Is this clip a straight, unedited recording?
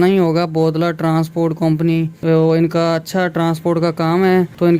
no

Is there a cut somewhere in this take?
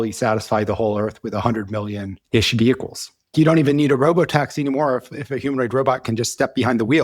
yes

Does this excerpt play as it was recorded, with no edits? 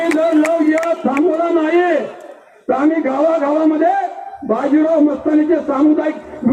yes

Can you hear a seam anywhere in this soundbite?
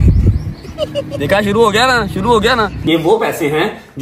yes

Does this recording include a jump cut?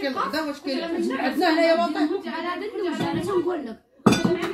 no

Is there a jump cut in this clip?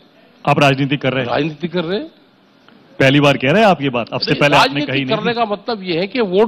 no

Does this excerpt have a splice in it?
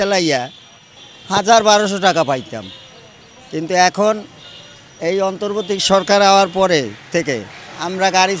no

